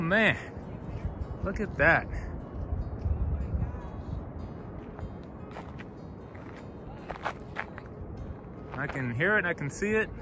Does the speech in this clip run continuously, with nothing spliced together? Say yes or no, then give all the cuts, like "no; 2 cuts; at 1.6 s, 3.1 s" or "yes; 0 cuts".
yes; 0 cuts